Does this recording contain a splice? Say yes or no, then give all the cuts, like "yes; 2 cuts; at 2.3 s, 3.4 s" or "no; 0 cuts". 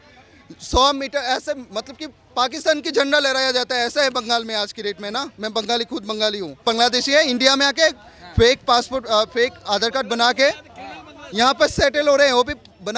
yes; 1 cut; at 6.6 s